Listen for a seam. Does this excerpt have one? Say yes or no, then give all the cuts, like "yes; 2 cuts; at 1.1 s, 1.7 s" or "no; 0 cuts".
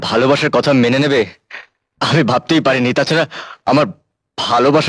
no; 0 cuts